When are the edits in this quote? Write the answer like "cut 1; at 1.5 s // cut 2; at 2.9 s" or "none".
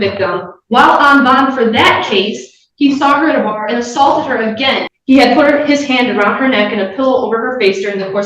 cut 1; at 4.9 s